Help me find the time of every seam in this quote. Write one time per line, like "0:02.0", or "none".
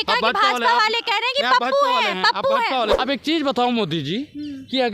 0:02.9